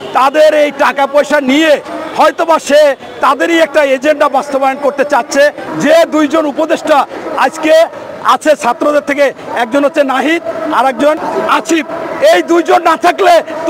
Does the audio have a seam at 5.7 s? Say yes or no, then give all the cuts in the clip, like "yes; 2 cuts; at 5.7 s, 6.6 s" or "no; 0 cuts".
yes; 1 cut; at 5.7 s